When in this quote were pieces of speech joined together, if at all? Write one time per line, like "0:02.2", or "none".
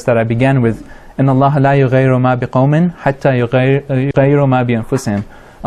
none